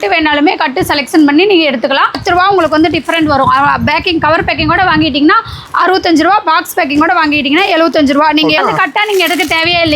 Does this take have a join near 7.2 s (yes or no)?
no